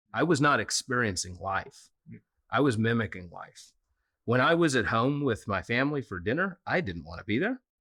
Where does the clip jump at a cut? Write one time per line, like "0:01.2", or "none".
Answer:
none